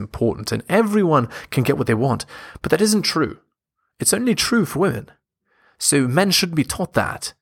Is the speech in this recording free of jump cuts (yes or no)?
yes